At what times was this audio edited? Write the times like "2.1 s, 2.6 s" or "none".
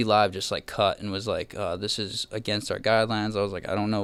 none